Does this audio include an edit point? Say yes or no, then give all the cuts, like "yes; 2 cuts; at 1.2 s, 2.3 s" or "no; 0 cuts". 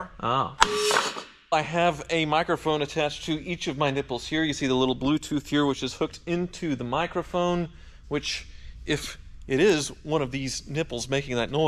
yes; 1 cut; at 1.5 s